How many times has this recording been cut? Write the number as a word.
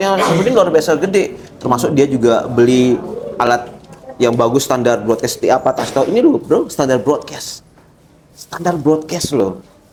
zero